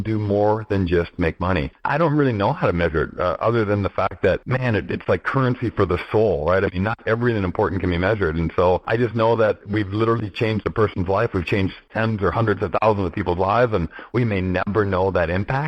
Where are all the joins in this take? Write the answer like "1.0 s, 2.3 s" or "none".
1.8 s, 4.4 s, 8.9 s, 9.6 s, 11.8 s